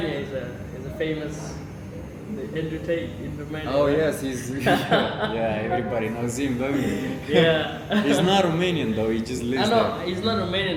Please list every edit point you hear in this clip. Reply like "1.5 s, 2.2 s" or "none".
none